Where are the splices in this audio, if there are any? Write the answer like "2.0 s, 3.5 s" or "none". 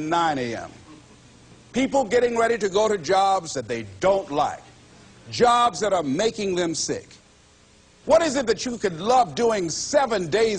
7.4 s